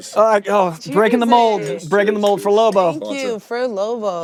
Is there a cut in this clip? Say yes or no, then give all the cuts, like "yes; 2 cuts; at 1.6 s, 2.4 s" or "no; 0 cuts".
no; 0 cuts